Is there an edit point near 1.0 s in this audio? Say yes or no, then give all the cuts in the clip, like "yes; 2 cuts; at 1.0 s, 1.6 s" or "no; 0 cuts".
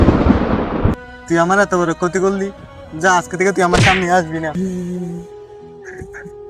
yes; 2 cuts; at 1.0 s, 4.5 s